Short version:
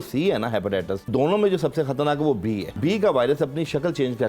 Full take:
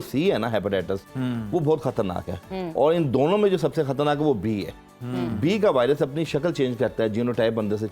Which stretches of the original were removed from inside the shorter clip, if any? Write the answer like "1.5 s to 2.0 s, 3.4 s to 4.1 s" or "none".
1.1 s to 3.1 s, 4.7 s to 5.3 s